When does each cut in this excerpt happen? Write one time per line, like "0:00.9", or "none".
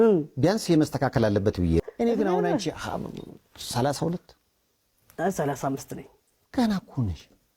0:01.8

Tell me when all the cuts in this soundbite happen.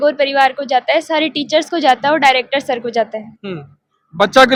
none

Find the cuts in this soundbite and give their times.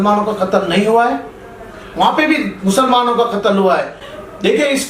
0:04.0

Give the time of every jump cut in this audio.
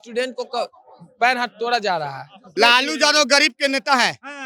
0:02.4

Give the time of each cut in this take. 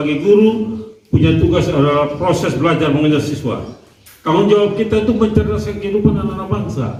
none

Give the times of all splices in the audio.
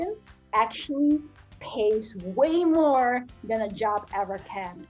none

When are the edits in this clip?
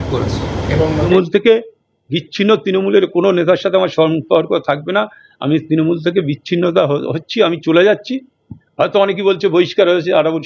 0:01.0

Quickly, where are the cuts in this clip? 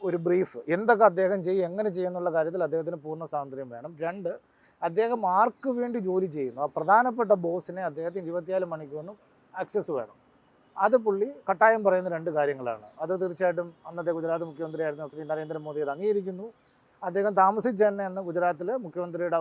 none

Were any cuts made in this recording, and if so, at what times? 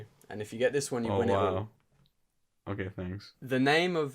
none

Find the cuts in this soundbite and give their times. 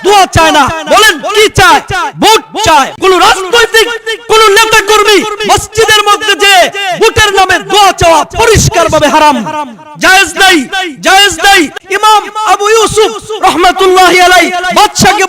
0:02.9
0:11.8

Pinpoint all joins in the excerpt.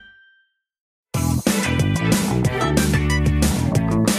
0:00.9

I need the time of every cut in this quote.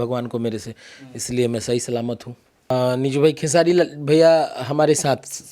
0:02.7

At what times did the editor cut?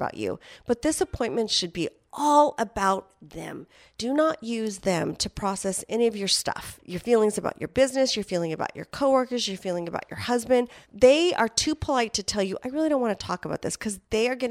none

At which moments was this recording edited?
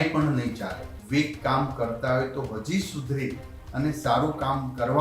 0:01.0

